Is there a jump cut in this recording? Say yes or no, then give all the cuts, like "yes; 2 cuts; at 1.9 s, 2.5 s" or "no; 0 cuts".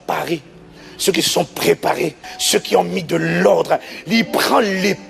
yes; 1 cut; at 2.3 s